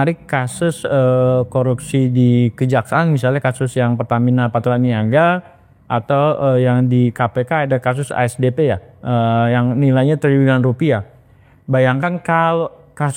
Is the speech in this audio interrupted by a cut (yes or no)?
no